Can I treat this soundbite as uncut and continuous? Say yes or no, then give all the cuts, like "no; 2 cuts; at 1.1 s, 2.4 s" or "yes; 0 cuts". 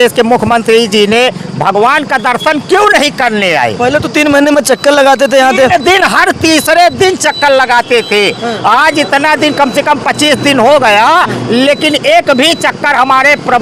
yes; 0 cuts